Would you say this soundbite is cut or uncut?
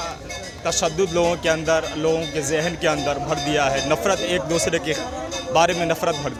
uncut